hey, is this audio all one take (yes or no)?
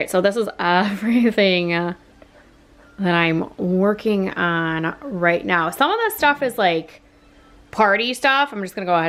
yes